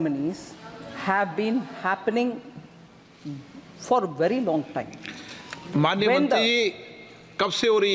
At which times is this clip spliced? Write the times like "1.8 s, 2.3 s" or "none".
none